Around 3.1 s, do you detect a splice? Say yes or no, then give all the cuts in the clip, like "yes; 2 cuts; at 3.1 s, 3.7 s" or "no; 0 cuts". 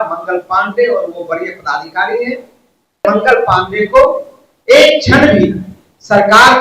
yes; 1 cut; at 3.1 s